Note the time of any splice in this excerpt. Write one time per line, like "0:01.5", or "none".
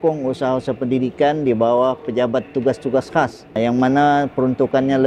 0:03.5

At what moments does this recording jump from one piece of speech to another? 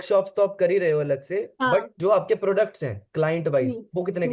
none

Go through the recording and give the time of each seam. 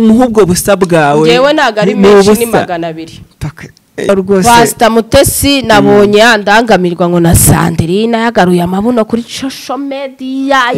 0:04.1

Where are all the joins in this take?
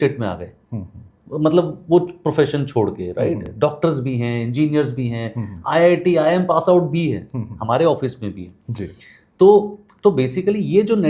none

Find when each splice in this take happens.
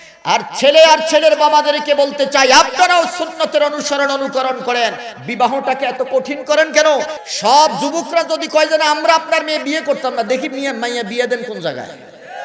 0:07.1

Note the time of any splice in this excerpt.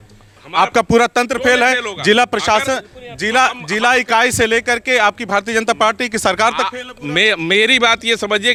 none

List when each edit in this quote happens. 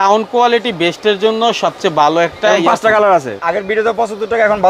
0:03.4

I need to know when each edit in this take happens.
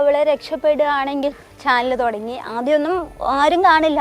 0:01.5

